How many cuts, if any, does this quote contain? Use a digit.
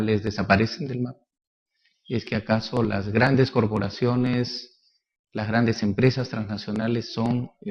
1